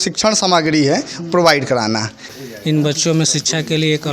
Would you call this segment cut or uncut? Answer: cut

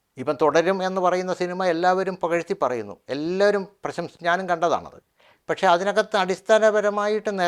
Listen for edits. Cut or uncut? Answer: uncut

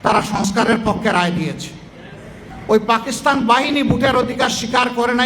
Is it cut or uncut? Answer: cut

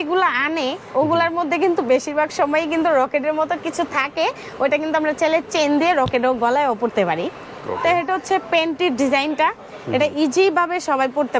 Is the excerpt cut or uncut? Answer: uncut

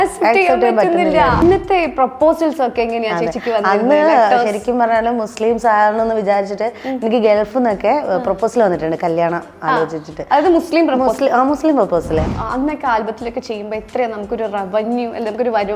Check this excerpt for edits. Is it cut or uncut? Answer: cut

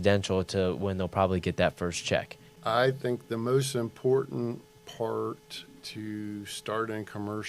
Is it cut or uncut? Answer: cut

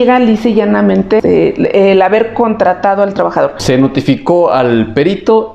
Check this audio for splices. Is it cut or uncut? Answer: cut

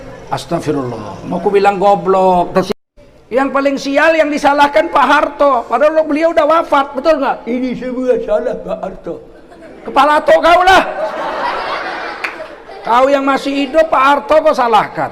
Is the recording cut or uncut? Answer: cut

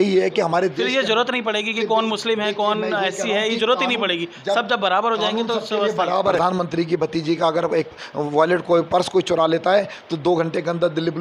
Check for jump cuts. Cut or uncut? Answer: cut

